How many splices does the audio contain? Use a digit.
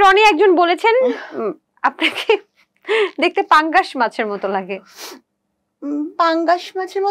0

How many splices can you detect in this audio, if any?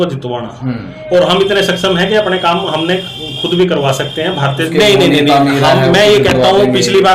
1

